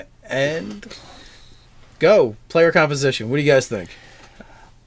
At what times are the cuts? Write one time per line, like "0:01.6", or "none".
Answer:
none